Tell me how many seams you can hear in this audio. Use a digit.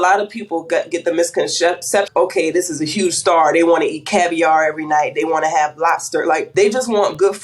2